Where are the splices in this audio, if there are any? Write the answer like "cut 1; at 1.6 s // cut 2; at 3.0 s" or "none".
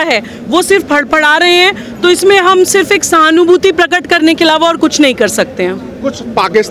none